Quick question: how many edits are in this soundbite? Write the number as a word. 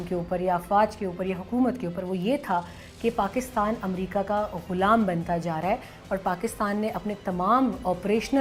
zero